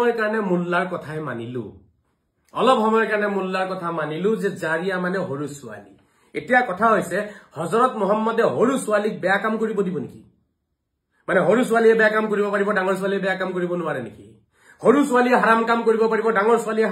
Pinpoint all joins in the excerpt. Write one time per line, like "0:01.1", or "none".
none